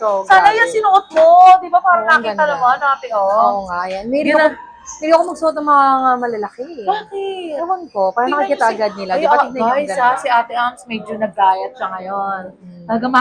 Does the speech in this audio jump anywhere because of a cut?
no; 0 cuts

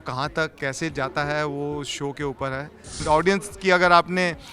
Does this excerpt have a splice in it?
yes; 1 cut; at 3.0 s

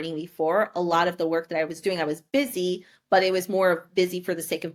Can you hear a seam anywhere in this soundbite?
no; 0 cuts

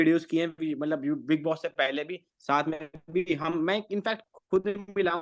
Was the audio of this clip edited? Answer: no; 0 cuts

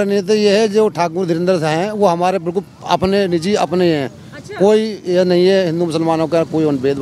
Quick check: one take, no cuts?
yes; 0 cuts

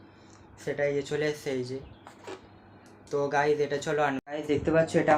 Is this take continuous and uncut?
no; 1 cut; at 4.3 s

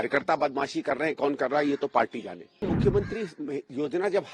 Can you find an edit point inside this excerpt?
yes; 1 cut; at 2.6 s

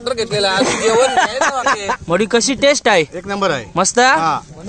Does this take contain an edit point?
yes; 1 cut; at 1.9 s

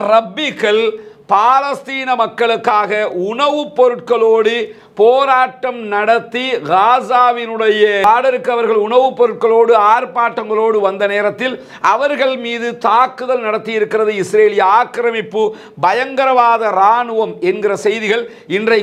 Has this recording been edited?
no; 0 cuts

